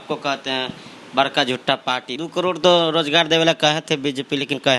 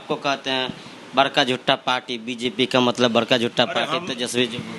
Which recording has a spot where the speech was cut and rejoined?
first; 1 cut; at 2.1 s

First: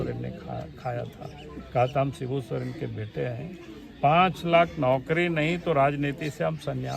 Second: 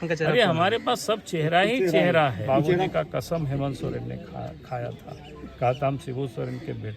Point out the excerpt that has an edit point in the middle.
second; 1 cut; at 2.9 s

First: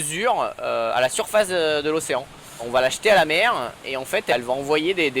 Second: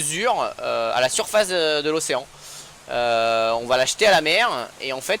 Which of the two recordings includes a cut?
first; 2 cuts; at 2.7 s, 4.3 s

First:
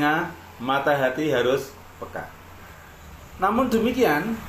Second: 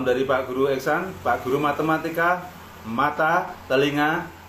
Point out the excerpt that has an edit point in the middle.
first; 1 cut; at 2.7 s

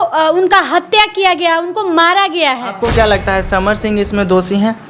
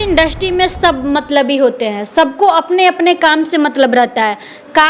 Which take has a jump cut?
first; 1 cut; at 2.8 s

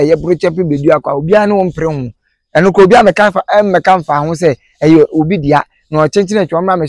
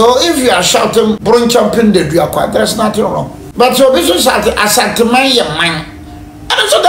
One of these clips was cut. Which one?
second; 2 cuts; at 1.2 s, 3.4 s

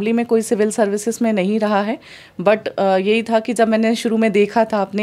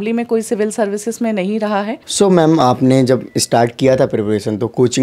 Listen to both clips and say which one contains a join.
second; 1 cut; at 2.0 s

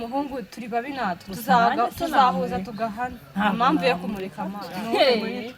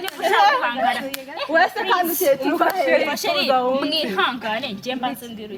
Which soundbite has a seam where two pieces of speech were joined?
first; 1 cut; at 4.4 s

